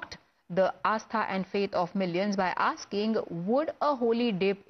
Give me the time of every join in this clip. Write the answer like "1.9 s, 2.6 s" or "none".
3.1 s